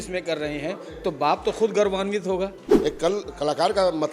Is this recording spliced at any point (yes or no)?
yes